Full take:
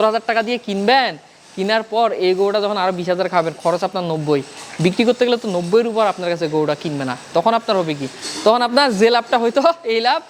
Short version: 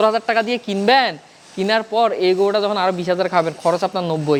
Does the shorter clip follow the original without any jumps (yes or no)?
yes